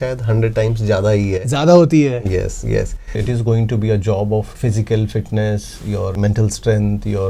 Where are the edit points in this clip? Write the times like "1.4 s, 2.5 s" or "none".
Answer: 3.1 s, 4.5 s, 6.1 s